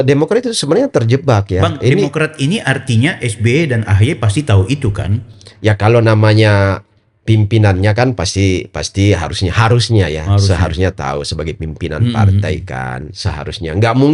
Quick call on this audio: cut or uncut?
uncut